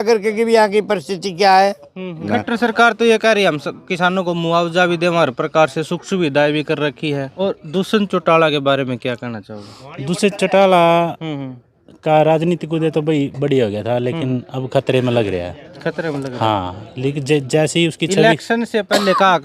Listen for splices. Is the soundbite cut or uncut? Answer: cut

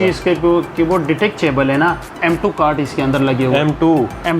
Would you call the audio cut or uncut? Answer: cut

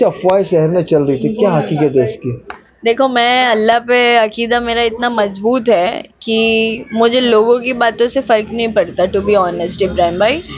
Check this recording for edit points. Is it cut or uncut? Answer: uncut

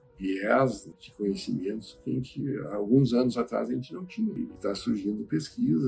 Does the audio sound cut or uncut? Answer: cut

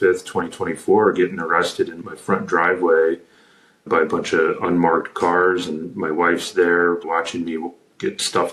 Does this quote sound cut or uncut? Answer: uncut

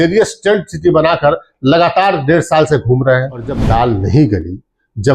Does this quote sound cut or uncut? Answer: cut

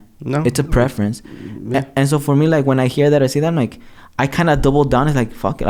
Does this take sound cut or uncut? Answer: uncut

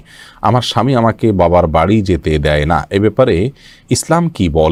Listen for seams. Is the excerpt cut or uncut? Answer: uncut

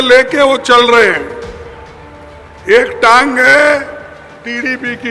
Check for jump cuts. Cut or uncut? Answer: uncut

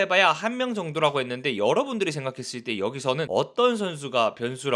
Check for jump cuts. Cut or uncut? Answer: uncut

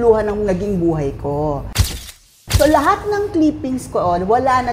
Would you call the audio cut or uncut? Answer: cut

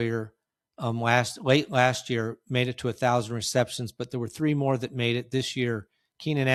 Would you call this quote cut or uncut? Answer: uncut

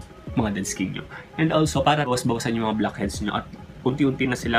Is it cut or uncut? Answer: uncut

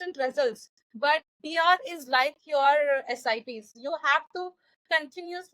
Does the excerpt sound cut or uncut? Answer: cut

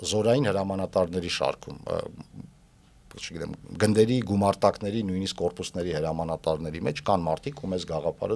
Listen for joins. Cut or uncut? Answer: uncut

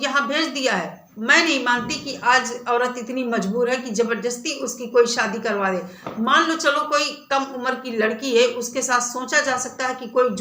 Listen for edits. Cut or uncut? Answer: cut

